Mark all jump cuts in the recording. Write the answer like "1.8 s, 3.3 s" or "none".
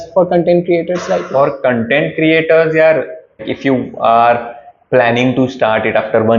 3.5 s

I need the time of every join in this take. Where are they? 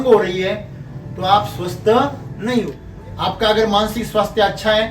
2.8 s

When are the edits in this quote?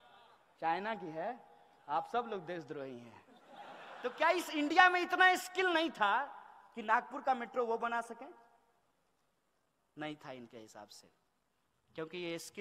3.9 s

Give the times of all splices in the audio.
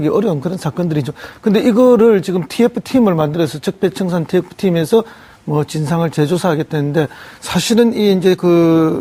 none

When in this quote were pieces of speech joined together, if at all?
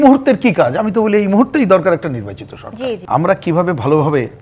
3.0 s

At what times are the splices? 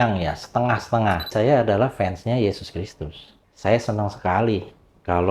1.3 s

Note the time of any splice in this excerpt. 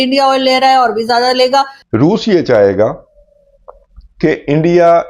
1.8 s

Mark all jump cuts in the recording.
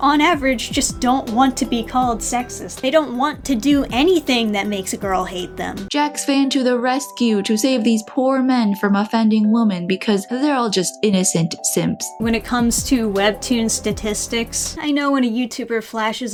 none

